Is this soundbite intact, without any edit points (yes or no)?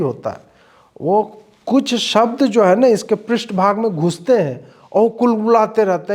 yes